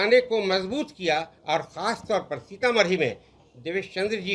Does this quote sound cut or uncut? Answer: cut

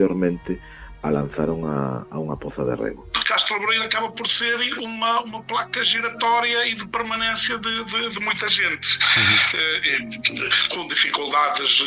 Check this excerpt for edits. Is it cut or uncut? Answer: cut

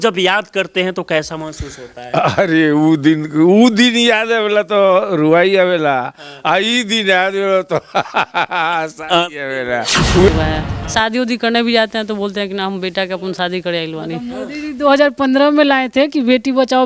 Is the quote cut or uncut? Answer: cut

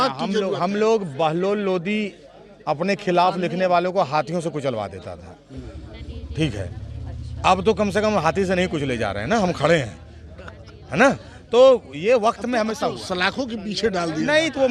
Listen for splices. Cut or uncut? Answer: uncut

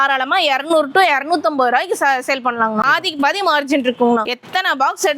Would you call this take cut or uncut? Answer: cut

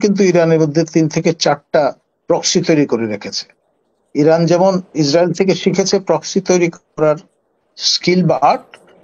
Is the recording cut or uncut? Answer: uncut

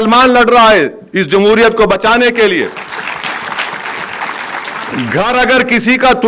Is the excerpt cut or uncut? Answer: uncut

